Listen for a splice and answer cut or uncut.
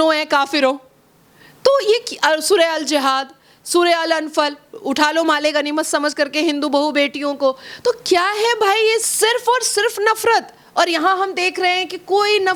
uncut